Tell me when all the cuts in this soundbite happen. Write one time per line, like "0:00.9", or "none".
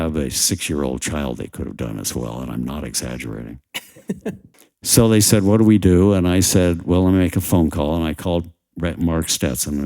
0:04.5